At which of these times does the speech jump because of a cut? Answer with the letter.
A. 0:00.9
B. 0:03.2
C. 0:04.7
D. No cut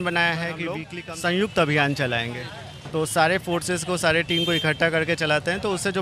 A